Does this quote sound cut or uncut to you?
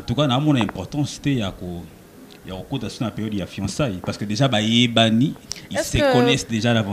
uncut